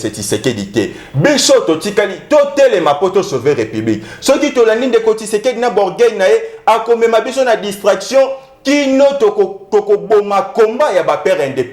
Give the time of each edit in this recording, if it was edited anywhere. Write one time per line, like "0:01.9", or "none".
none